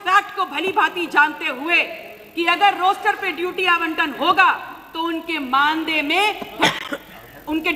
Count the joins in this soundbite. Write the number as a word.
zero